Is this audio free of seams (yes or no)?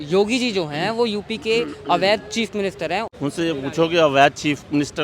no